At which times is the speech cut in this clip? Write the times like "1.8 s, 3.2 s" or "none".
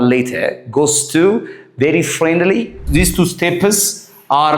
2.8 s